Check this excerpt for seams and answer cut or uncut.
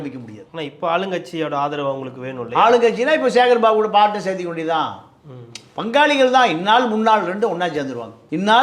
uncut